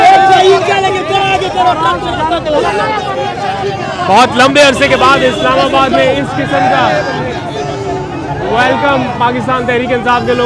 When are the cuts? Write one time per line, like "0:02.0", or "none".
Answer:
none

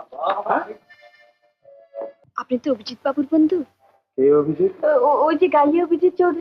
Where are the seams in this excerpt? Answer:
0:02.2

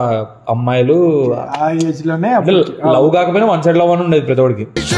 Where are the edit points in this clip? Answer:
none

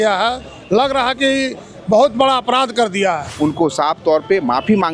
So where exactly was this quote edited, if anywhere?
0:03.3

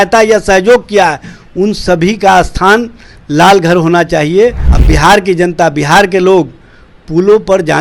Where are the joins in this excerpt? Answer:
0:04.7

